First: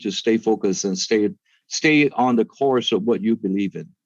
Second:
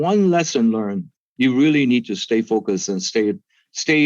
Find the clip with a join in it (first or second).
second